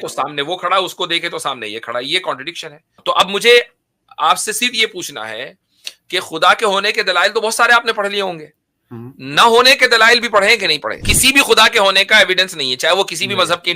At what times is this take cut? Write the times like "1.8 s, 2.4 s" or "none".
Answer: 3.0 s, 11.1 s

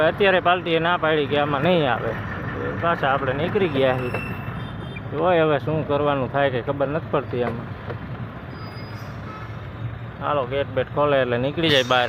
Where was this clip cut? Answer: none

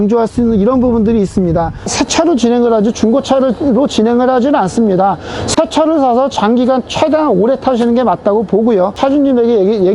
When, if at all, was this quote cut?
1.9 s, 9.0 s

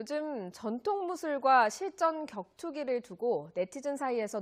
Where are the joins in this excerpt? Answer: none

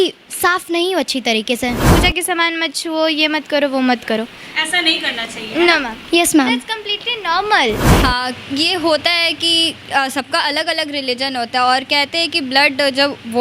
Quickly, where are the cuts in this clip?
1.8 s, 7.9 s

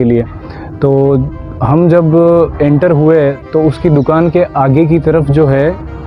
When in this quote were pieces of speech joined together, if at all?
none

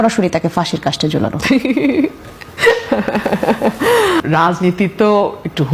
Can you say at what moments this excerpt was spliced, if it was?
4.2 s

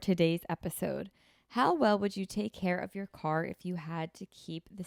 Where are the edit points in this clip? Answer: none

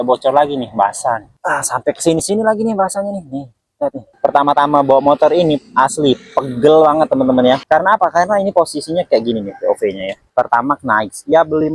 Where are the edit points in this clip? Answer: 1.3 s, 4.1 s, 10.2 s

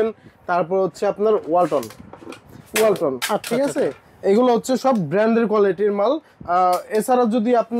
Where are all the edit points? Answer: none

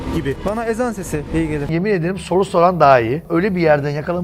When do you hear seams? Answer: 1.6 s, 3.2 s

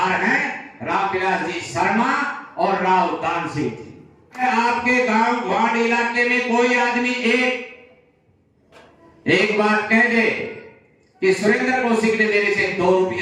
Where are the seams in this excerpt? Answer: 4.4 s

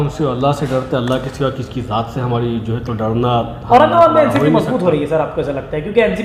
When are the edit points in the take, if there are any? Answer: none

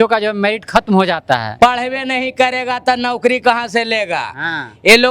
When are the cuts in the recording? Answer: 1.5 s

